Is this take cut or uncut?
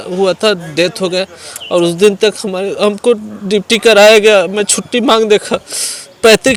uncut